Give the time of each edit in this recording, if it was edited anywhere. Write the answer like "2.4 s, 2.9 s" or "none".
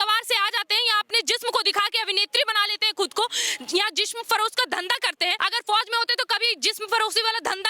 5.4 s